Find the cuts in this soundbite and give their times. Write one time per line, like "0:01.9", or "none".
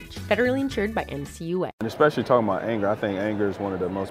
0:01.8